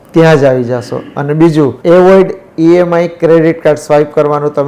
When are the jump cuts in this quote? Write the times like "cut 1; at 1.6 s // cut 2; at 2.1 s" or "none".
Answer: cut 1; at 1.8 s